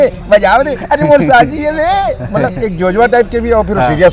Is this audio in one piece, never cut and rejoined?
yes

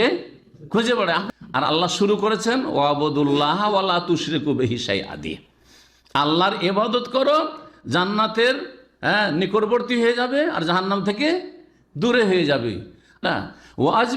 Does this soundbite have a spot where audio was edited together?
yes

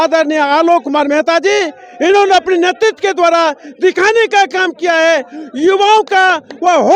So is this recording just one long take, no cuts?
yes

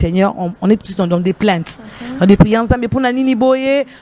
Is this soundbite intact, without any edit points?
yes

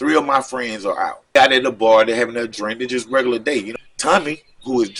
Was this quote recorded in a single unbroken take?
no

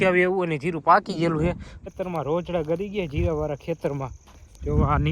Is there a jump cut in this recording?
yes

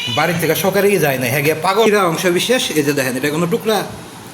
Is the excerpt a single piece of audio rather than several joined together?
no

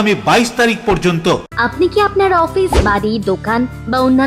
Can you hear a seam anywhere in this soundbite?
yes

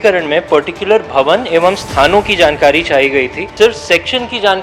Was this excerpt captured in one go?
no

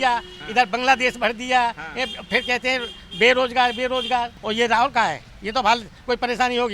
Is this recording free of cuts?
no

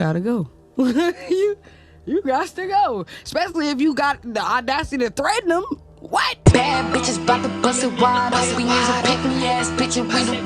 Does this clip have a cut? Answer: yes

